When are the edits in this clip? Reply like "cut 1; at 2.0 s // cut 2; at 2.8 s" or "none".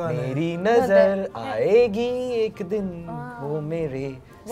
none